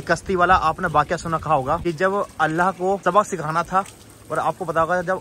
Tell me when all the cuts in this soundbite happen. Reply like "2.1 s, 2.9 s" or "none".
1.8 s, 3.0 s

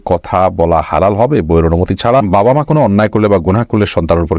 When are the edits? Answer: 2.3 s

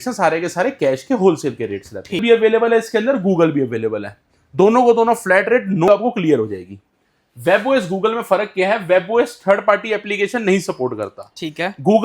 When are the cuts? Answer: 2.2 s, 5.9 s

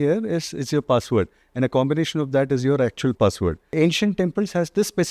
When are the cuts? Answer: 3.6 s

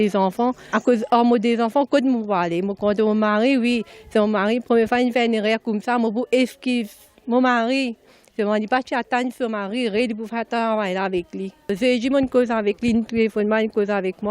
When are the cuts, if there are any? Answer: 13.1 s

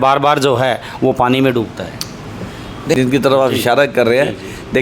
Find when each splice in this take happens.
2.9 s

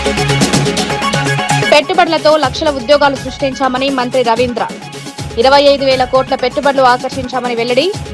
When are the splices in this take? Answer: 1.7 s

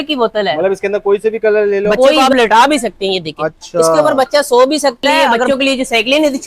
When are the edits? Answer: 2.1 s, 5.4 s

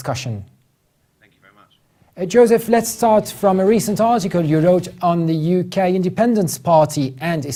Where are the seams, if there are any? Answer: none

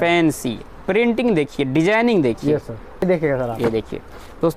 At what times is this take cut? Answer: 3.0 s

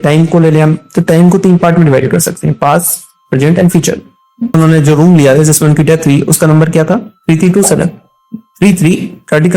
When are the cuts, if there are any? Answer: 4.5 s

